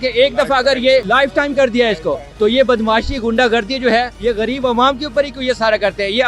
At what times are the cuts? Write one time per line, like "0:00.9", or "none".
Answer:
0:01.1
0:02.3
0:04.1